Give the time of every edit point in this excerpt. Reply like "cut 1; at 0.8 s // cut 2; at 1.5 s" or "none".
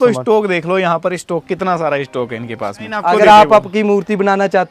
cut 1; at 3.0 s

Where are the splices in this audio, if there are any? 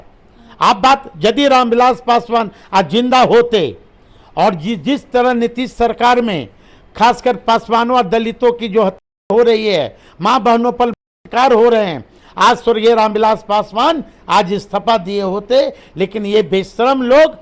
none

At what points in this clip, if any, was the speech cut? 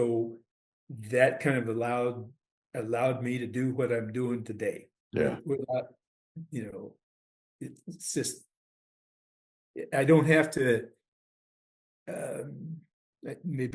none

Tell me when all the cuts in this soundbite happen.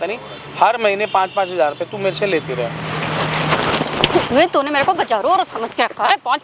none

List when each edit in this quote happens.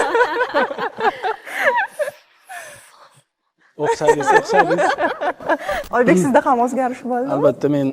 cut 1; at 5.8 s

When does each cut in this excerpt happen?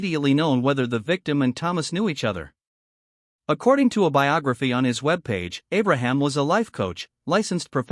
none

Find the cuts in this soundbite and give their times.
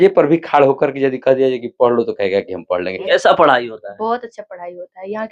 cut 1; at 2.9 s

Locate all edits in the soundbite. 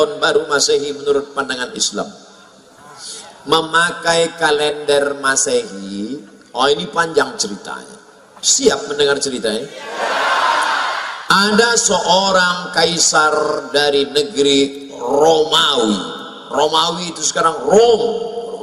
none

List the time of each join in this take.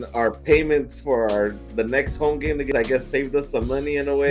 cut 1; at 2.7 s

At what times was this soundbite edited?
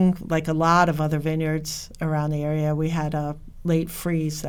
none

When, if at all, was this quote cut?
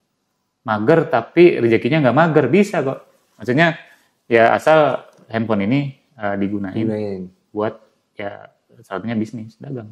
none

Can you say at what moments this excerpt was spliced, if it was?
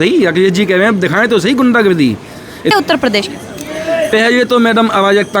cut 1; at 2.7 s

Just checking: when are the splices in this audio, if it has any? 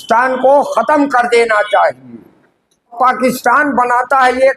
cut 1; at 2.9 s

